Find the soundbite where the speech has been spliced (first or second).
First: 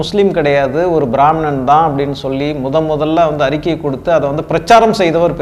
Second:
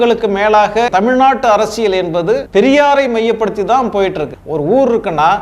second